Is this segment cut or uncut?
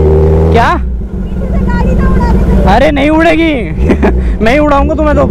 uncut